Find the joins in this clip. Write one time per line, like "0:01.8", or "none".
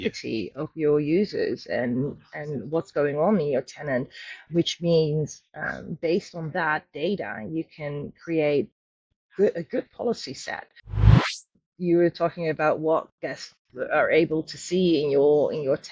0:11.1